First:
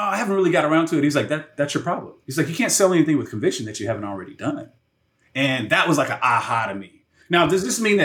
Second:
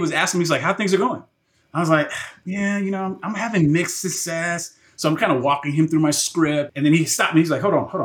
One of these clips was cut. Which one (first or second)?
second